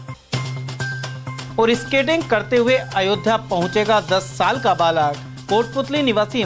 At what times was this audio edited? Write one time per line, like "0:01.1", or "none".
none